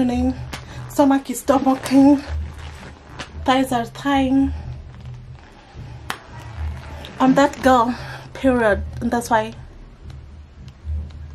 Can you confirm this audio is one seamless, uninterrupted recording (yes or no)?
yes